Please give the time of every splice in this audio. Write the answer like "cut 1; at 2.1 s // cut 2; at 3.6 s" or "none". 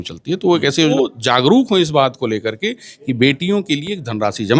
cut 1; at 0.9 s